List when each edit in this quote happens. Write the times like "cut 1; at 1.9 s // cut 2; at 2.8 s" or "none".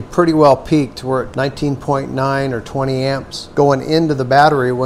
cut 1; at 1.3 s // cut 2; at 3.4 s